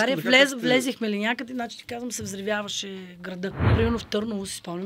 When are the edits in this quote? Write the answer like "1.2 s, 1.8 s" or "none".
3.7 s